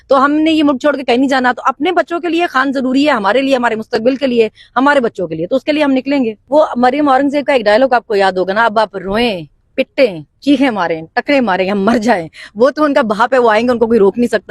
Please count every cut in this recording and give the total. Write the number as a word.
one